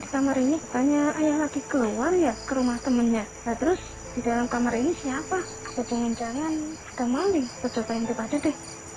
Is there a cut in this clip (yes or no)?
no